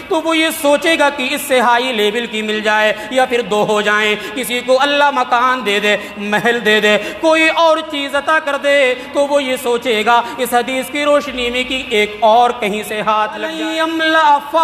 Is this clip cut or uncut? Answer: cut